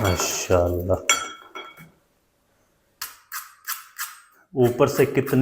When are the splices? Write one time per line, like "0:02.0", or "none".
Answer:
0:03.0